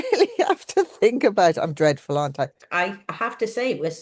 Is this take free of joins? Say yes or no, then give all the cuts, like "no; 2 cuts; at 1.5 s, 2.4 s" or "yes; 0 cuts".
no; 1 cut; at 2.6 s